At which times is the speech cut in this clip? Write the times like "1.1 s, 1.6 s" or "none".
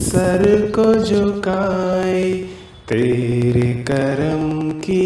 1.2 s